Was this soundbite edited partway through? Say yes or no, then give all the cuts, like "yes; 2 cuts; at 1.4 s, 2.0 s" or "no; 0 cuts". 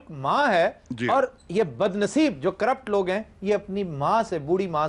no; 0 cuts